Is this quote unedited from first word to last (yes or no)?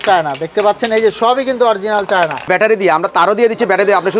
no